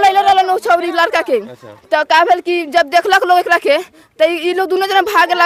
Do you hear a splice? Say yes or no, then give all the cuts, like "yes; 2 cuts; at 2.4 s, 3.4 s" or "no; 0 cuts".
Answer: no; 0 cuts